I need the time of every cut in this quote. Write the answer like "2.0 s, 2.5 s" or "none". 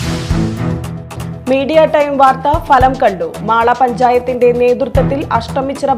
1.0 s